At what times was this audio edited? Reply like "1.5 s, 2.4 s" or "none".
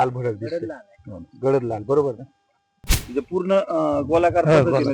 3.0 s